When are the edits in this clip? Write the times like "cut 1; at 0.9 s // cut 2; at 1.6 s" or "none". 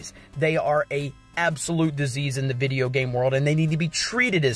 none